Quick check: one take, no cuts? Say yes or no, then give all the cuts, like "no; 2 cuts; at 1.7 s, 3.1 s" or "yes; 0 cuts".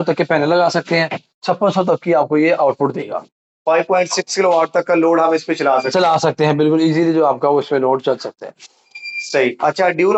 yes; 0 cuts